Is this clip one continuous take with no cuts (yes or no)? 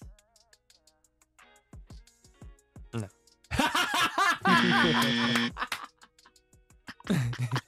yes